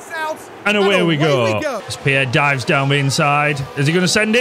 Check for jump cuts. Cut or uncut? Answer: cut